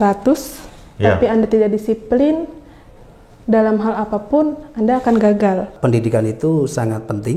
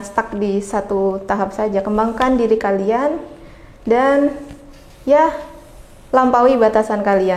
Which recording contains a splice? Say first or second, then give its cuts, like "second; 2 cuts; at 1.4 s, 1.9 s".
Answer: first; 1 cut; at 5.7 s